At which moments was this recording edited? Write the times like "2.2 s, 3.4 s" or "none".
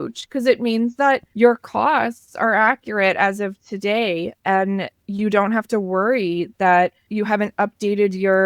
1.3 s, 7.0 s